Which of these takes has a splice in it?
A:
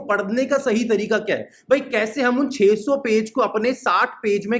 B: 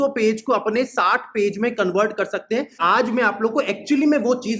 B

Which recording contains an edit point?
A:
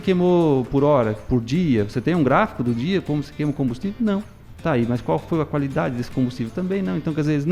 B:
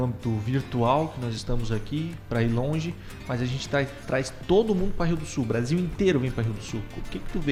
A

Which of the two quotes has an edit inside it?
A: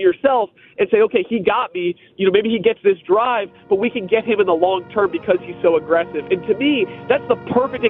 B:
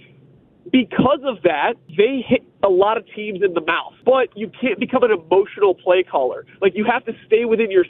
B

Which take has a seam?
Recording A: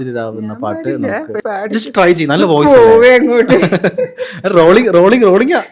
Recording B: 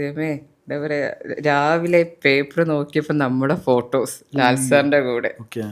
A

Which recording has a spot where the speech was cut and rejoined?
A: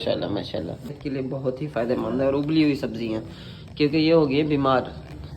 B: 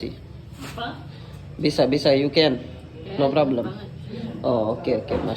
A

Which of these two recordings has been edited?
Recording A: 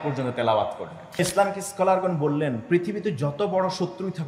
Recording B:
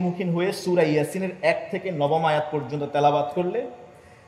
A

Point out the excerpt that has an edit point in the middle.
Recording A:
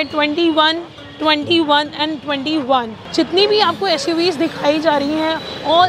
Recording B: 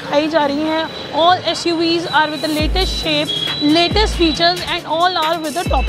A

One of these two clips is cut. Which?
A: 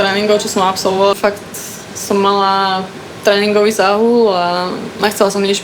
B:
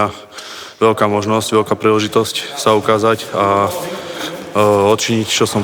A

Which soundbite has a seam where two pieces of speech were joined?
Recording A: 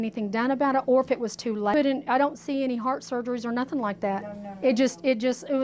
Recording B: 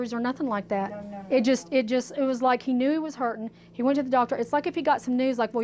A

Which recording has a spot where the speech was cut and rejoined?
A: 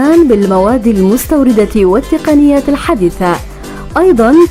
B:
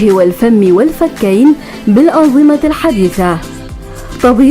B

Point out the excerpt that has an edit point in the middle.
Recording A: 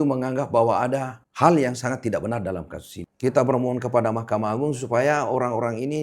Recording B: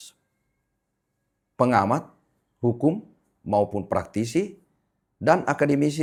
A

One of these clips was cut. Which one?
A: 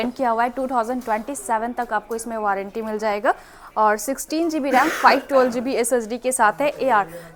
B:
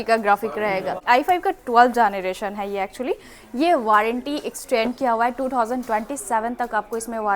B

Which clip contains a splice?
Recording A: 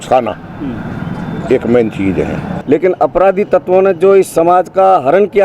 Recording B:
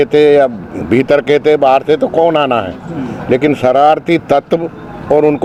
A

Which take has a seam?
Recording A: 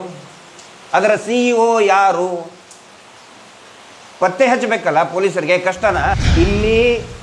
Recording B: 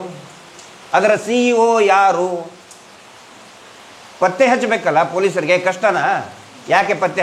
A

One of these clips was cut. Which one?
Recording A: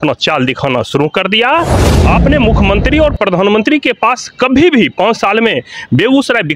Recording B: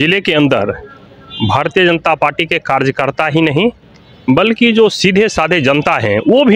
A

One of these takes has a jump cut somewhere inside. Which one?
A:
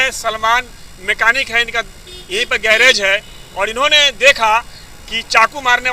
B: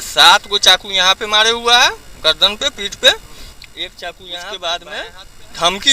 B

